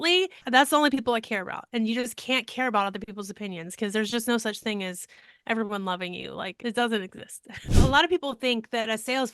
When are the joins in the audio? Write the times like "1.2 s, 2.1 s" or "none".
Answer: 7.7 s

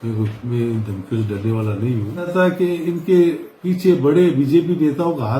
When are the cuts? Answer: 2.3 s

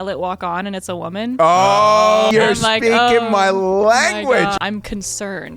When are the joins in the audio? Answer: 2.3 s, 4.6 s

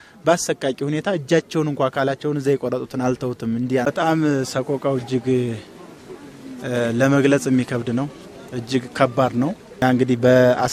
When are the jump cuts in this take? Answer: 3.8 s, 9.8 s

